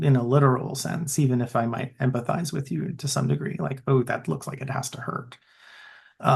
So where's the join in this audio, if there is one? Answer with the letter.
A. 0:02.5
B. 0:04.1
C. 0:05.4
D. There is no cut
D